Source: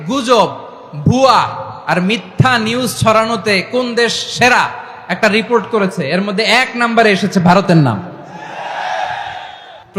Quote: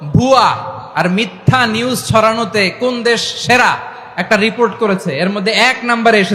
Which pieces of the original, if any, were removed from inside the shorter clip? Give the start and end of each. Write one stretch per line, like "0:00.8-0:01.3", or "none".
none